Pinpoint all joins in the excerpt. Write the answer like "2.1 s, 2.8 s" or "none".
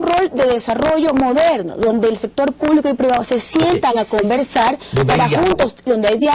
2.6 s